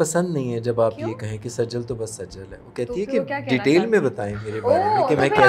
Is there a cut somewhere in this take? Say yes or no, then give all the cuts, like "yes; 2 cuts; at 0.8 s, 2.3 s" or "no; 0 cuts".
no; 0 cuts